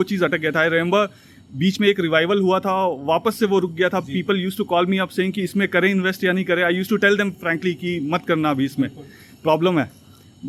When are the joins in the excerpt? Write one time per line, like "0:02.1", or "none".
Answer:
none